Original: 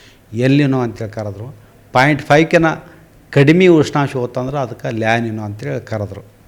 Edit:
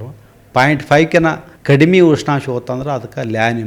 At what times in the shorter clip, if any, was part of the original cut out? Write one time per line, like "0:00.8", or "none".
0:01.5